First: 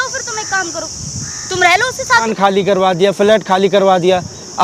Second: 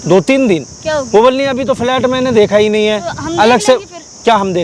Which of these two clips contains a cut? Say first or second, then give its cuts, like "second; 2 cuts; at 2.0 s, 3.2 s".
first; 1 cut; at 2.3 s